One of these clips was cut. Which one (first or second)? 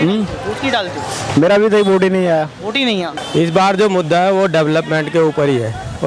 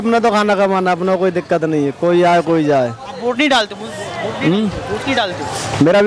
first